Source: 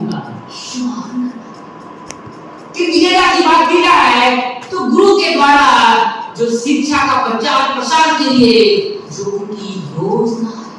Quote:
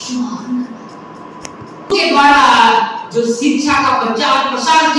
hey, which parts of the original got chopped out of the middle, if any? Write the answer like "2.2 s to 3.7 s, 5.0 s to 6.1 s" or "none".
2.6 s to 5.2 s